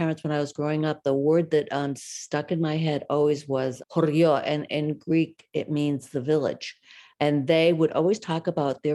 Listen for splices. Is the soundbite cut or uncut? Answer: uncut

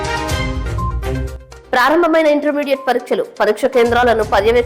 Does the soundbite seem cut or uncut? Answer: cut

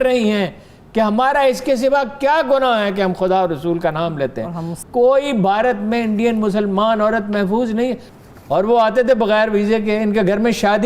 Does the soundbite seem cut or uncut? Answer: cut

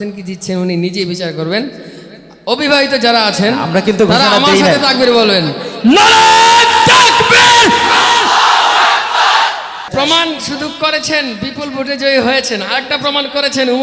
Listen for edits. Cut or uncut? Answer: cut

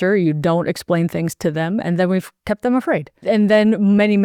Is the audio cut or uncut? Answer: cut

